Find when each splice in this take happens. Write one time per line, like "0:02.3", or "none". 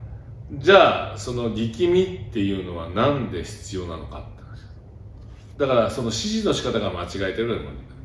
none

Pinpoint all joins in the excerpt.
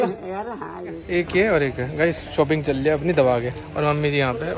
0:00.9

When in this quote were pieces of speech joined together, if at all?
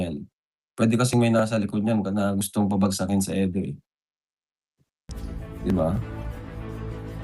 0:06.0

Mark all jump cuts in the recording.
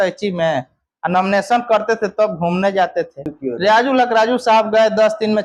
0:03.3

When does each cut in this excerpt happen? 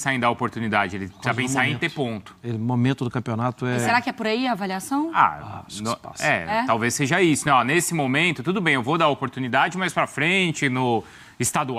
none

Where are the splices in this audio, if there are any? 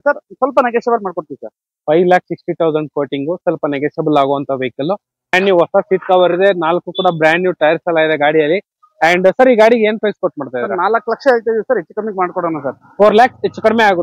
0:05.3

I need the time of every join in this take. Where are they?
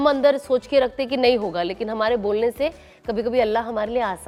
none

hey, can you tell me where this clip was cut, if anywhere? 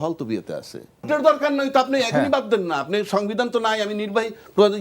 0:01.1

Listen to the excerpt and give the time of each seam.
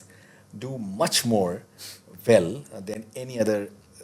0:03.0

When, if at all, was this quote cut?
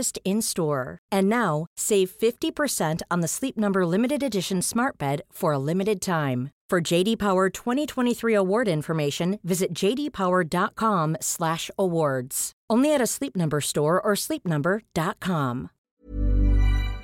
0:15.8

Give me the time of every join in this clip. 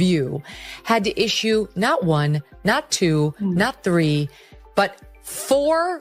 none

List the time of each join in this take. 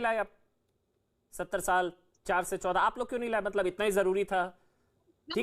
none

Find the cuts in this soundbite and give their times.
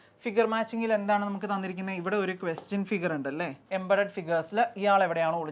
0:03.6

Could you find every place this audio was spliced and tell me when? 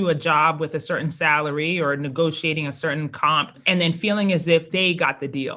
0:03.6
0:04.7

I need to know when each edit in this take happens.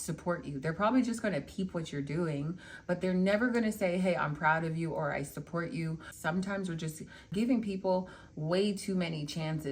0:06.1

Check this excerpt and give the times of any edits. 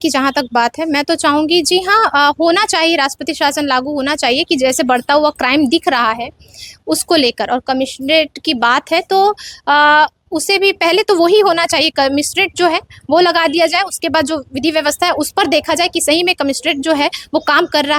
none

